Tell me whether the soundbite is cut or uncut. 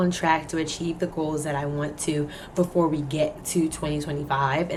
uncut